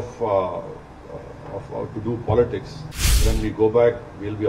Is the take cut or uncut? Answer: cut